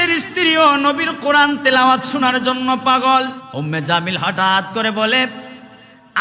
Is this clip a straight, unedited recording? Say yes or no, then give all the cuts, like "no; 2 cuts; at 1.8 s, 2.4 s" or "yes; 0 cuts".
no; 1 cut; at 3.4 s